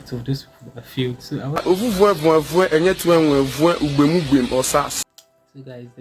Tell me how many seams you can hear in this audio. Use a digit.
1